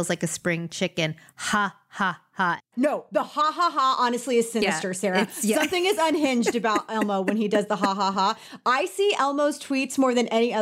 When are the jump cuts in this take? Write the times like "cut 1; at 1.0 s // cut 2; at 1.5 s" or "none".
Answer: cut 1; at 2.7 s